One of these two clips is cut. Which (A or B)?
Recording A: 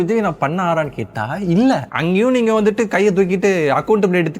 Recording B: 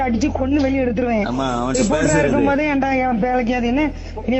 A